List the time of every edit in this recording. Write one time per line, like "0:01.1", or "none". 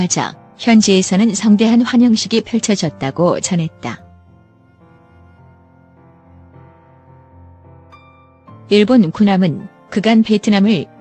0:04.7
0:08.7